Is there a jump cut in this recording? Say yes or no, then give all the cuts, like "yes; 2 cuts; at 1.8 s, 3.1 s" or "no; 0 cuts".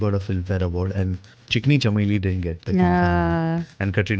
yes; 1 cut; at 1.3 s